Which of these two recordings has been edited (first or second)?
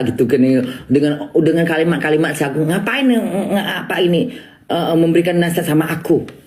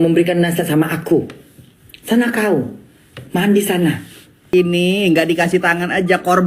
second